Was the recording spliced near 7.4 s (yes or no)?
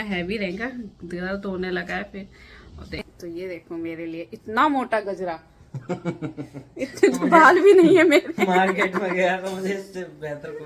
no